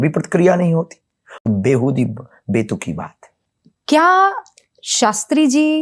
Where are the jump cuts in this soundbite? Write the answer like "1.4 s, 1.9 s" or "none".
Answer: 1.4 s